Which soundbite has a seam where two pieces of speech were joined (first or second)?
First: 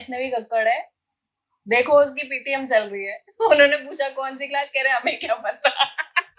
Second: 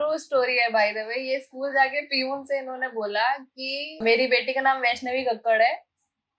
second